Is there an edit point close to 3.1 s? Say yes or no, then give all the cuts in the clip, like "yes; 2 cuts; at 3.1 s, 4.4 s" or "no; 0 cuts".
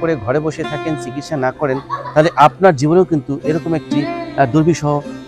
no; 0 cuts